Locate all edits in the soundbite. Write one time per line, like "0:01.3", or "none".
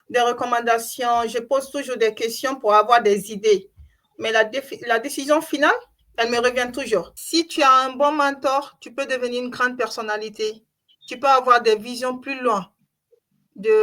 0:07.2